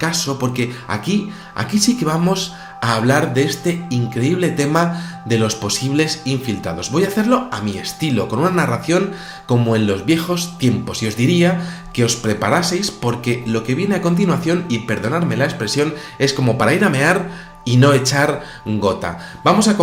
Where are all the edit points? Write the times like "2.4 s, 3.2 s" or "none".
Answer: none